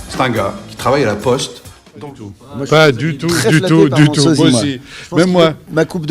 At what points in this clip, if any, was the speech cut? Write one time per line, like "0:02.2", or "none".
0:01.4